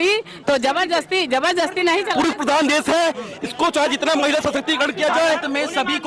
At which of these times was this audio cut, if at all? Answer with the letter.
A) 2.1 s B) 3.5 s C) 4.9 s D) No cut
A